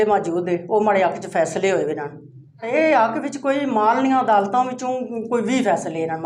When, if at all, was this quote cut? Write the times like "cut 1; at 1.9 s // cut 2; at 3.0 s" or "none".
cut 1; at 2.7 s

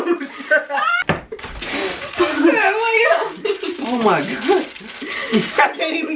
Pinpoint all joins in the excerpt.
cut 1; at 0.9 s

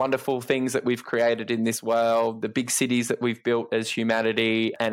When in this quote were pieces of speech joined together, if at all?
cut 1; at 2.4 s

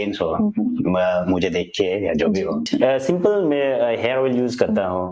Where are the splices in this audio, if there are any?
cut 1; at 2.7 s

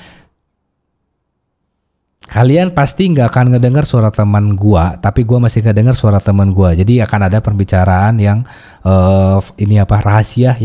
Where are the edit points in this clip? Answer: none

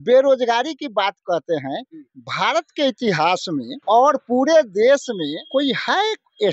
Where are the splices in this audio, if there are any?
cut 1; at 3.7 s // cut 2; at 5.4 s

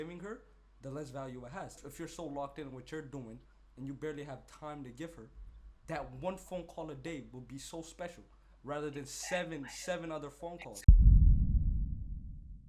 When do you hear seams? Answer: cut 1; at 1.8 s // cut 2; at 10.7 s

